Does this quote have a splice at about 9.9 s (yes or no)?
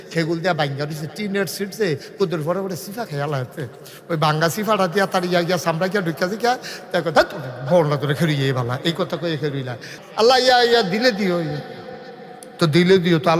yes